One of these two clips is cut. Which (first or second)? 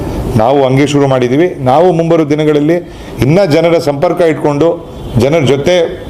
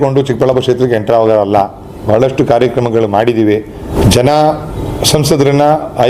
second